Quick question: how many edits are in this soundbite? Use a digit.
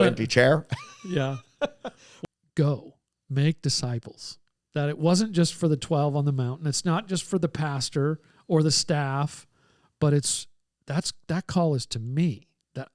1